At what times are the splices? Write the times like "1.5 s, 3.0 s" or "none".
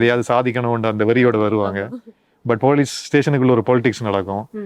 none